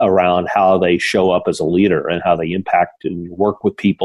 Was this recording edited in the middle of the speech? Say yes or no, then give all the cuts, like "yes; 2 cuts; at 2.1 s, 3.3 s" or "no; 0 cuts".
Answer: no; 0 cuts